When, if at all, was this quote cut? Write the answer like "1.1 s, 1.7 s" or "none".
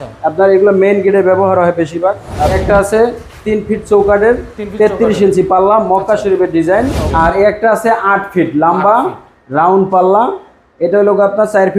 2.5 s, 7.0 s

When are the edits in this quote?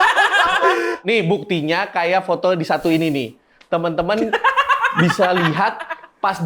1.0 s

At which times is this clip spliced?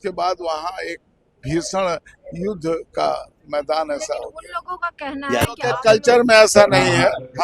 5.7 s

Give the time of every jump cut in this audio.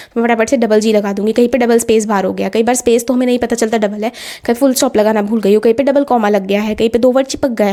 none

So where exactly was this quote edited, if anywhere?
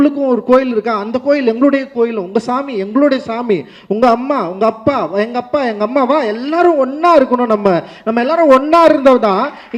none

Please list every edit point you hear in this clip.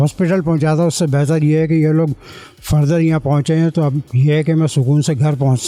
none

